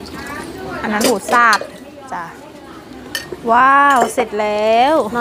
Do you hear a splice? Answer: no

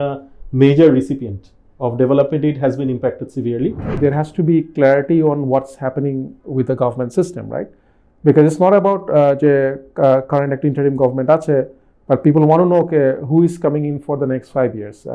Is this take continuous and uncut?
no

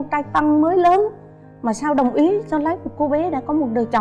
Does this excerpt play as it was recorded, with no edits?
yes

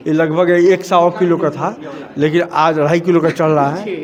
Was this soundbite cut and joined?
no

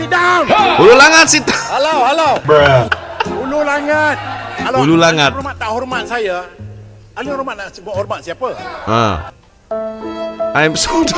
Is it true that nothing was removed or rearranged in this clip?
yes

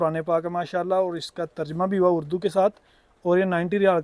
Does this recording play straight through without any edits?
yes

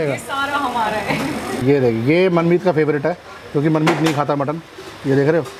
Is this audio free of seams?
no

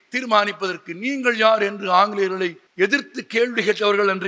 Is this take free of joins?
no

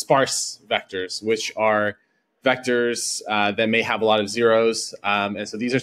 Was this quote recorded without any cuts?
yes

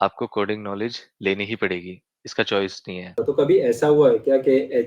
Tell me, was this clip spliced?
yes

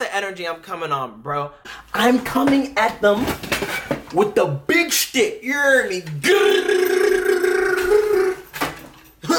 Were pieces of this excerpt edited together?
yes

